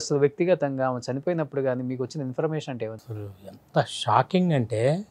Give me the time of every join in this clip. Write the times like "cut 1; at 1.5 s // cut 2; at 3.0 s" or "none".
cut 1; at 3.0 s